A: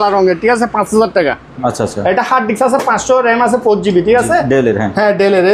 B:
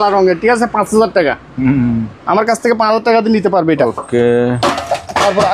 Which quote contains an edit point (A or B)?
A